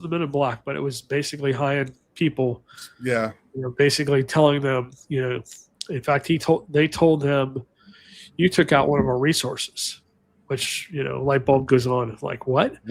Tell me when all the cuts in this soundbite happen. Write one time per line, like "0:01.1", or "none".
none